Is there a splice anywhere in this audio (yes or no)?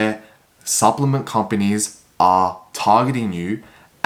no